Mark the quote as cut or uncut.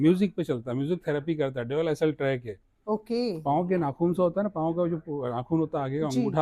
uncut